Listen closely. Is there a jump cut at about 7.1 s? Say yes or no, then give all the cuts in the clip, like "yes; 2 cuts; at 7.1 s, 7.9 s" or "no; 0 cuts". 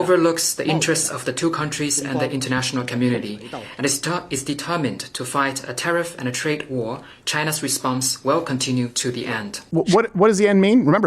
no; 1 cut; at 9.6 s